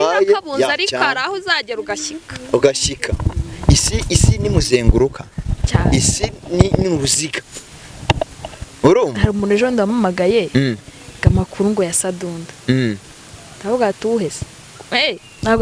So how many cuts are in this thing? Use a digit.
0